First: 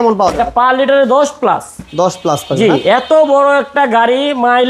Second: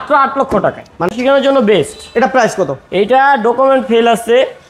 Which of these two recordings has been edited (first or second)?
second